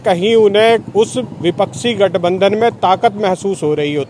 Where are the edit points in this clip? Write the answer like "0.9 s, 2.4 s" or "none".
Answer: none